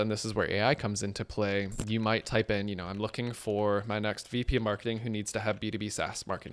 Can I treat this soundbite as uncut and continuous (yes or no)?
no